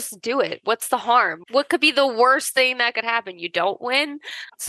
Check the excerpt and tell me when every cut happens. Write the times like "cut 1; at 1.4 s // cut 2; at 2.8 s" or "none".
none